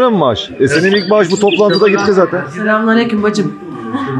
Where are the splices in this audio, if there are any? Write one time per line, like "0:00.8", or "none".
0:02.5